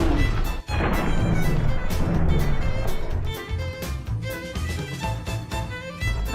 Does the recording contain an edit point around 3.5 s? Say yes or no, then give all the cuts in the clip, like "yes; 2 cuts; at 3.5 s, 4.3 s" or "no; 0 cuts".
yes; 1 cut; at 3.5 s